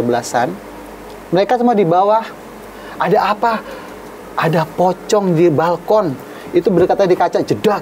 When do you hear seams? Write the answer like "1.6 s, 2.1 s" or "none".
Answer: none